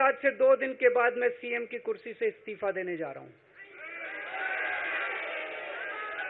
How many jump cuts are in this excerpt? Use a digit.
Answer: 0